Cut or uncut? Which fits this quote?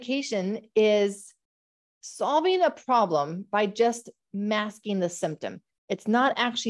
uncut